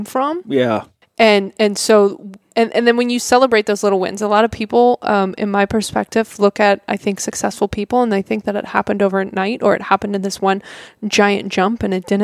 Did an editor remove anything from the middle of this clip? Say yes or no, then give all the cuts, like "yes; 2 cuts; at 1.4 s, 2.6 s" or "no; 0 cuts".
no; 0 cuts